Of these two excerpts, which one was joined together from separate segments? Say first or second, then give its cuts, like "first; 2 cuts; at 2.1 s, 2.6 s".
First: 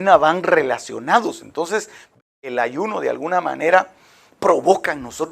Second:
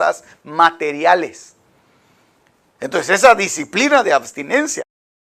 first; 1 cut; at 2.2 s